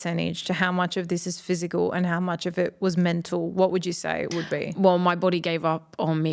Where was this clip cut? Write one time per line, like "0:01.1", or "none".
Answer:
none